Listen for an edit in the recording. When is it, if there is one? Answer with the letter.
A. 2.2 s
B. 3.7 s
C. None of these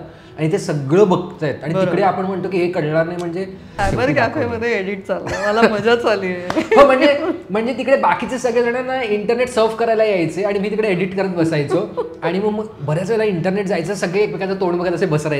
B